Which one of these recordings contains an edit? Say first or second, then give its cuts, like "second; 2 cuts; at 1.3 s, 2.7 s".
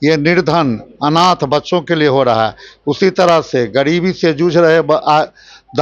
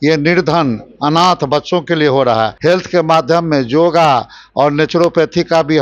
second; 1 cut; at 2.5 s